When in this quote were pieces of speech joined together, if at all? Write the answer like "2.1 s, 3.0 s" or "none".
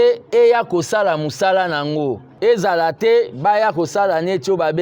2.3 s